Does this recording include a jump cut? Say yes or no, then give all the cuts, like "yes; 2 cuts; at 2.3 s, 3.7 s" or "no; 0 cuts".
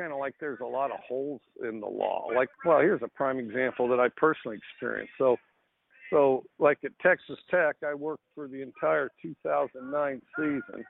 yes; 1 cut; at 2.5 s